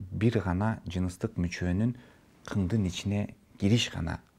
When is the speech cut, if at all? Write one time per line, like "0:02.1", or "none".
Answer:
none